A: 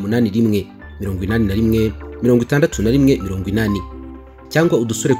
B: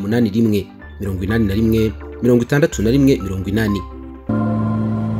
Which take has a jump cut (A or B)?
B